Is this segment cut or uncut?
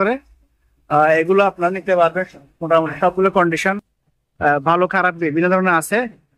uncut